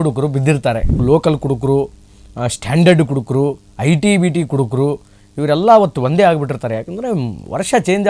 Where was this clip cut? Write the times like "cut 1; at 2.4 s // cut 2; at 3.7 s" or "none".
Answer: cut 1; at 1.0 s